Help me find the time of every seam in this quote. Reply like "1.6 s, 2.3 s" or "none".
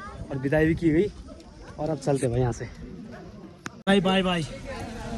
3.8 s